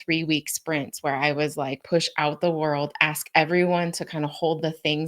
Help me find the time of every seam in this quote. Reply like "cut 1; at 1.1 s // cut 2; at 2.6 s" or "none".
cut 1; at 1.8 s